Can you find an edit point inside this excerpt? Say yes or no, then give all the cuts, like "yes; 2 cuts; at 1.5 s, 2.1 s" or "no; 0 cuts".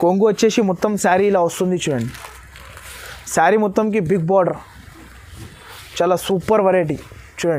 no; 0 cuts